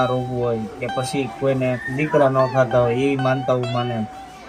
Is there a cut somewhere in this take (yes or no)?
no